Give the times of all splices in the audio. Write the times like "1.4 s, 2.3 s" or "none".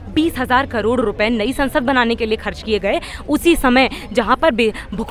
none